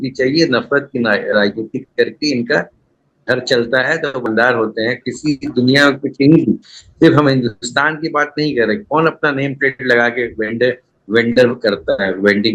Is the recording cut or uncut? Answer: cut